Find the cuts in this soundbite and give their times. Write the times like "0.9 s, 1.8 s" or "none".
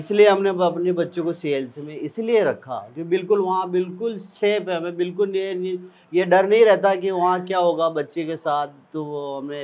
none